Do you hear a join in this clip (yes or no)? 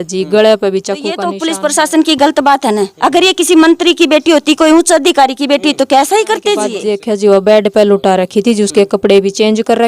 yes